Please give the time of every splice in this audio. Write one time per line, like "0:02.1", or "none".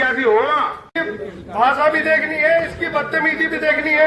0:00.9